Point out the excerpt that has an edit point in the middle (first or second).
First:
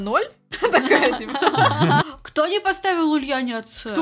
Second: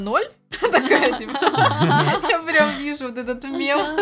first